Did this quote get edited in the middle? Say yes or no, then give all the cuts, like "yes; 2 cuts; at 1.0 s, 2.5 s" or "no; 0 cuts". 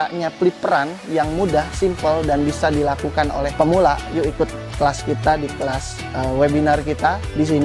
no; 0 cuts